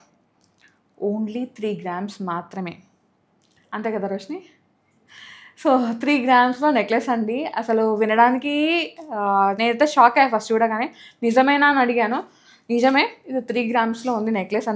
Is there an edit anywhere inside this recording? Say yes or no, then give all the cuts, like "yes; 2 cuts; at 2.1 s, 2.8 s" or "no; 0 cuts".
no; 0 cuts